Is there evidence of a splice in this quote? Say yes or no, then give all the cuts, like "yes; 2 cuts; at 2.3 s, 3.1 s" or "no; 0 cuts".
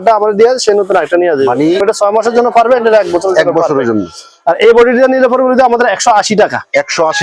yes; 1 cut; at 1.8 s